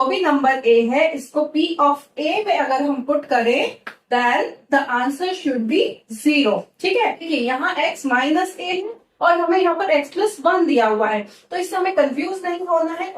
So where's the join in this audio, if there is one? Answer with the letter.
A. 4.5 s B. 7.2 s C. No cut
B